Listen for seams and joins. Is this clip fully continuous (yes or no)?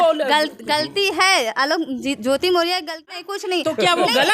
no